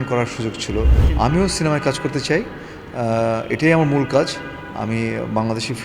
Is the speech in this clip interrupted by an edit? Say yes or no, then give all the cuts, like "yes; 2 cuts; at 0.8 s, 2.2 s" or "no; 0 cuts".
yes; 1 cut; at 1.0 s